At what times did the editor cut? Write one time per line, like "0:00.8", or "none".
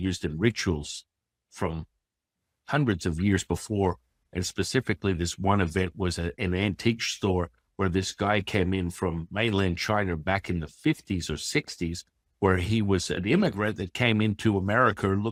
none